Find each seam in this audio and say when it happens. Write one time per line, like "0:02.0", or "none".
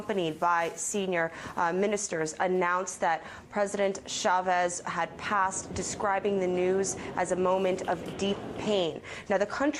none